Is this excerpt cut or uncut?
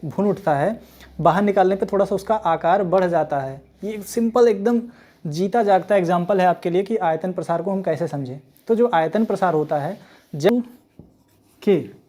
cut